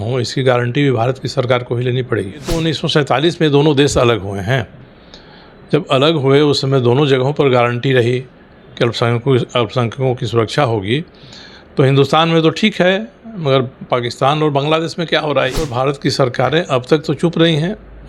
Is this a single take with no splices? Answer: no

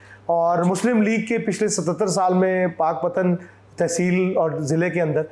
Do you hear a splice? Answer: no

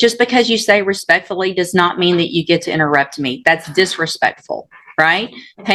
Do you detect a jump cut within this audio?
no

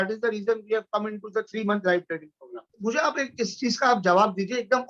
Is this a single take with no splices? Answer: no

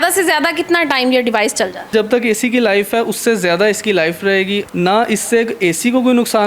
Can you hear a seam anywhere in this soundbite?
yes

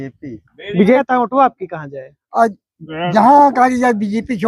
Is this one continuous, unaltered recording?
no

